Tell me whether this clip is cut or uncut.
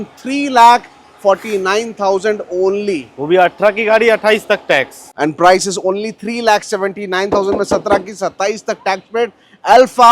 cut